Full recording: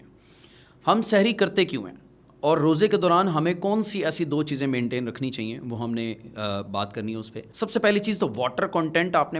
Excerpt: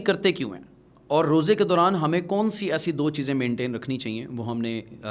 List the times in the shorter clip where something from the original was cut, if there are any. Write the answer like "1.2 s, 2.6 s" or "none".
none